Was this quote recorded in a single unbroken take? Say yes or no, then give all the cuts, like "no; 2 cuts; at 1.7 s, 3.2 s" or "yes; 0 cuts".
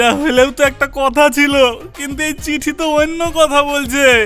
yes; 0 cuts